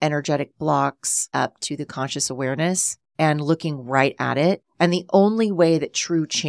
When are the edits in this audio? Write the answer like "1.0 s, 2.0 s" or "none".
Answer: 1.3 s, 3.0 s, 4.7 s

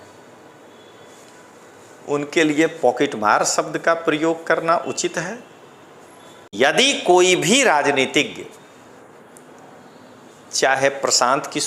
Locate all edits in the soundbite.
6.5 s

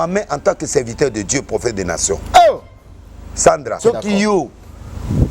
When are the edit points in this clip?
3.8 s

